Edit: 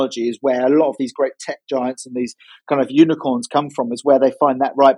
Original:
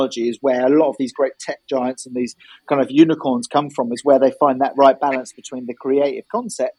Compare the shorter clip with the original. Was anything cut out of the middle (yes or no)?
no